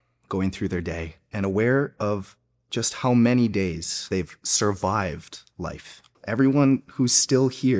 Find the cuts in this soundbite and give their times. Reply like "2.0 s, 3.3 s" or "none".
1.2 s, 4.0 s, 6.2 s